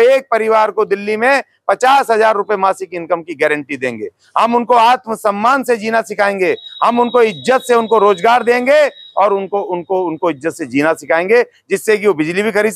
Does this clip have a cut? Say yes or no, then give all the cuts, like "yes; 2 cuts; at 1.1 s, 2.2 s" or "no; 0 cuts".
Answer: no; 0 cuts